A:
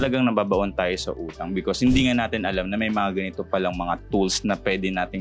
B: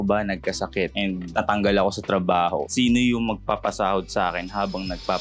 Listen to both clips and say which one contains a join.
B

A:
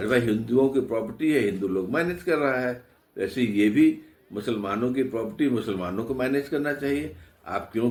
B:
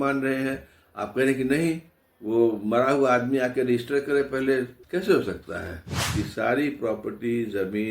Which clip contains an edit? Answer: B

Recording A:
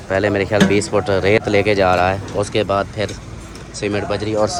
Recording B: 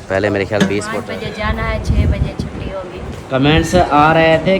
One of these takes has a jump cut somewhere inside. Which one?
B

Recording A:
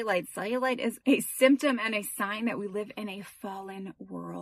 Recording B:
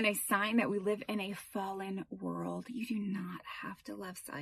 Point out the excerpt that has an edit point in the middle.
A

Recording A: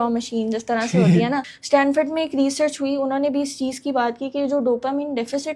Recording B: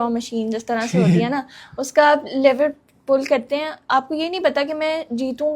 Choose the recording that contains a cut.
A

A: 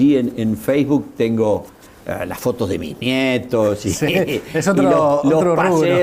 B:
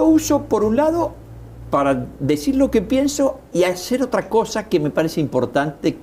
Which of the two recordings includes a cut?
B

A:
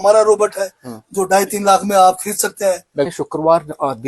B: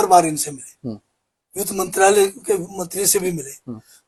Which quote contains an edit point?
A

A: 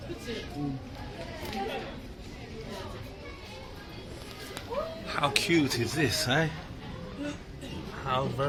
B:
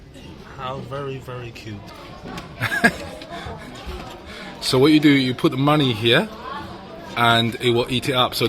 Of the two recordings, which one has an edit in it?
B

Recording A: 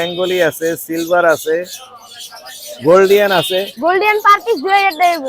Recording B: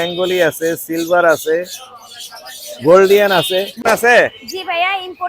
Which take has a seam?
B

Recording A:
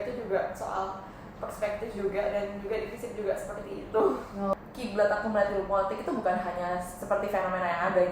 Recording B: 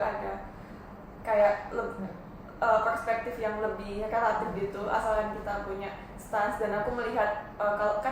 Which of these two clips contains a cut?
A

